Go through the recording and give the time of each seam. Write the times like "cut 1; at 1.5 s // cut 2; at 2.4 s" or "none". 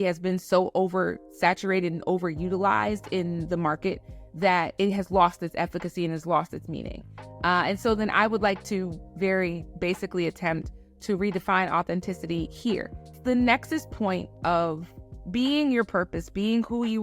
cut 1; at 13.2 s

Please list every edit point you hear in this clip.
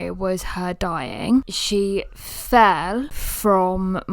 cut 1; at 1.6 s // cut 2; at 3.2 s

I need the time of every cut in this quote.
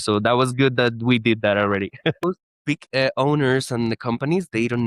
cut 1; at 2.2 s

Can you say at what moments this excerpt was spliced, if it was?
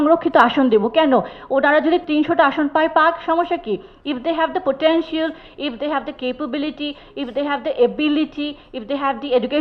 cut 1; at 2.0 s

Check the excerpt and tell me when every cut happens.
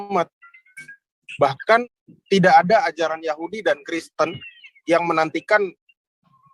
cut 1; at 1.8 s

